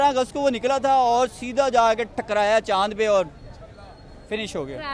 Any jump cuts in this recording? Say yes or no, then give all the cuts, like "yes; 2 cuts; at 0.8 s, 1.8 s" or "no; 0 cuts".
no; 0 cuts